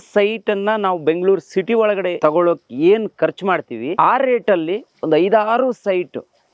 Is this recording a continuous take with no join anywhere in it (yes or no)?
no